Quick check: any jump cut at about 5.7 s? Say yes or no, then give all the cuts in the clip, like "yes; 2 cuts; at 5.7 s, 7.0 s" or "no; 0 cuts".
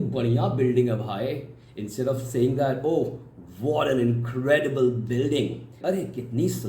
yes; 1 cut; at 5.7 s